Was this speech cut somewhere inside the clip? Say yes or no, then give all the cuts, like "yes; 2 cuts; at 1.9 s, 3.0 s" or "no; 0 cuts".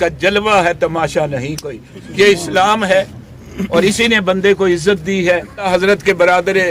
yes; 1 cut; at 5.7 s